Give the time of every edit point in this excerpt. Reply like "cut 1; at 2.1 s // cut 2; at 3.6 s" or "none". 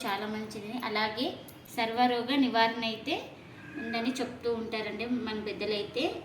cut 1; at 1.9 s